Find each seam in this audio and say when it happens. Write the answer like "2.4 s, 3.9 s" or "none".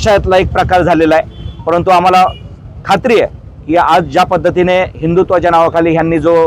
none